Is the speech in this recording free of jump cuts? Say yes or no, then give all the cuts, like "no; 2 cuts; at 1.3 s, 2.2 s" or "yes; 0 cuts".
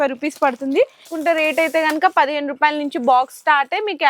no; 1 cut; at 1.0 s